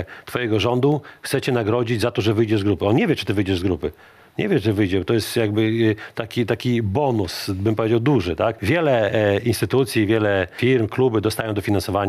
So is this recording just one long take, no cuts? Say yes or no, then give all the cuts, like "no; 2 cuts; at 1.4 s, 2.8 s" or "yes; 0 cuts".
no; 2 cuts; at 8.6 s, 10.5 s